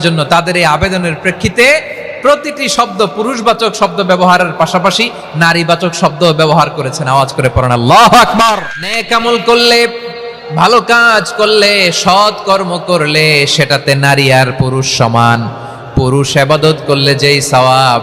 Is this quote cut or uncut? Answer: cut